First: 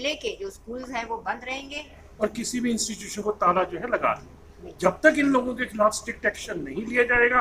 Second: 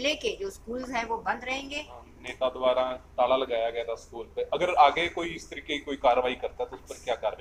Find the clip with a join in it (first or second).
first